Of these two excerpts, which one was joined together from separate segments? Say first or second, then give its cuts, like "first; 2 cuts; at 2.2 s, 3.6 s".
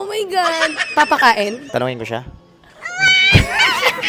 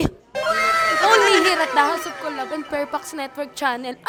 first; 1 cut; at 1.6 s